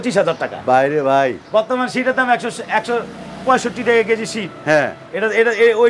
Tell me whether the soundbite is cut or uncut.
uncut